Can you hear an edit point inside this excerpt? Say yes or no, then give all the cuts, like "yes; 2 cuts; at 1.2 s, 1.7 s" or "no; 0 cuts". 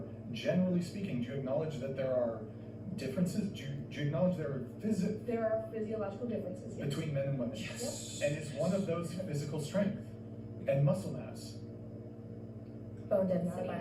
no; 0 cuts